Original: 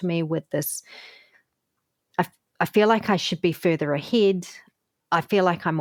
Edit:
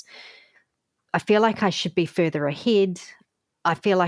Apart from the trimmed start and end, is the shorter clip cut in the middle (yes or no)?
yes